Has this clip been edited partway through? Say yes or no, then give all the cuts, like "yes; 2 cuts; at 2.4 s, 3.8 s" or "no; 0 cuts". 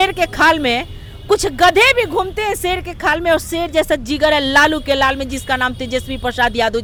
no; 0 cuts